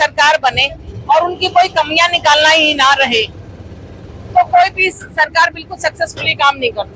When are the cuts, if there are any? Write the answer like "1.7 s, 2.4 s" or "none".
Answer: none